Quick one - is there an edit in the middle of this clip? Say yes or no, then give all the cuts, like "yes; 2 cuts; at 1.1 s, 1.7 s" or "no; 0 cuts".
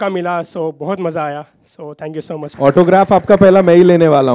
yes; 1 cut; at 2.5 s